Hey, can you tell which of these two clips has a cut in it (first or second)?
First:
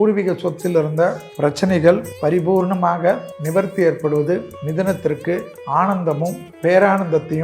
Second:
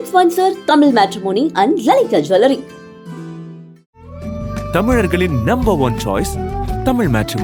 first